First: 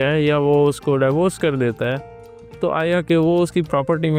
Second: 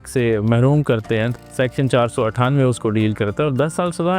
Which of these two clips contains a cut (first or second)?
second